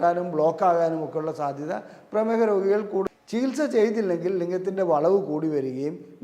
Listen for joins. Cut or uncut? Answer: cut